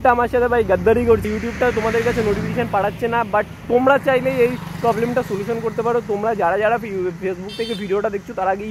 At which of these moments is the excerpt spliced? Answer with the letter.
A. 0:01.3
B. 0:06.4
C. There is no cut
A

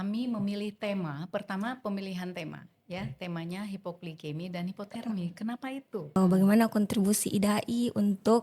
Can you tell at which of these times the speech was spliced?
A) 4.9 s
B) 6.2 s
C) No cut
B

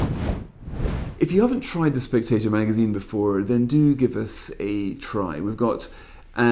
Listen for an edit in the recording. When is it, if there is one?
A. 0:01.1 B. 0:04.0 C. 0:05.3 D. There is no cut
A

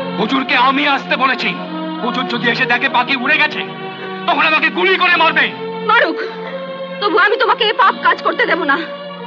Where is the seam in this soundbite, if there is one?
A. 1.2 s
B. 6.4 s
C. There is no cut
C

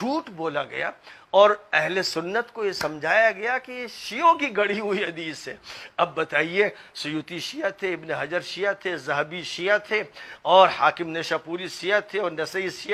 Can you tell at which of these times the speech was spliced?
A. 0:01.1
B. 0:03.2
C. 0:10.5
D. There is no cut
D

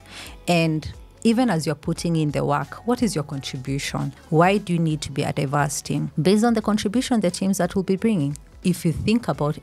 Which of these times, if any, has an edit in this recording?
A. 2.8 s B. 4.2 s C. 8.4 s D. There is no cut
B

